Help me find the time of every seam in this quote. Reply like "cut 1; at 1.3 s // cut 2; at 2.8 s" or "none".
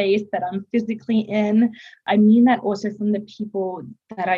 cut 1; at 2.0 s